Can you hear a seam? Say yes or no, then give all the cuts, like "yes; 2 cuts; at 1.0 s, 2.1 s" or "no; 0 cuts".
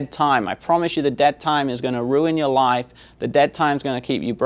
no; 0 cuts